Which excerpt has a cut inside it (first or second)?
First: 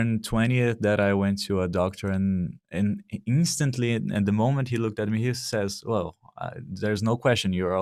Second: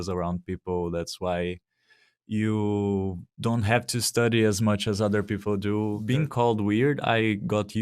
second